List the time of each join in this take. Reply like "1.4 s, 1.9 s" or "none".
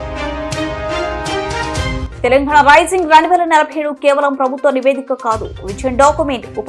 2.1 s